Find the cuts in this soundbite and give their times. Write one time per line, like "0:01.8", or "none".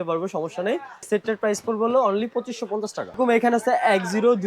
0:01.1
0:03.2